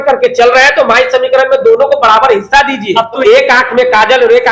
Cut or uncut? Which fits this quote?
cut